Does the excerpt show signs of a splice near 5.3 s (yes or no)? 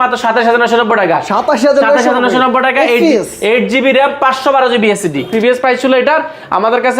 yes